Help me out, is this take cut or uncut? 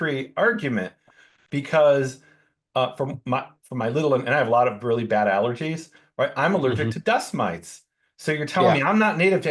uncut